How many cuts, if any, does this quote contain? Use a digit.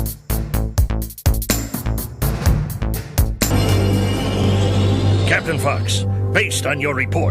1